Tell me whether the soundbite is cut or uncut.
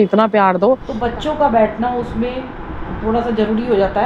cut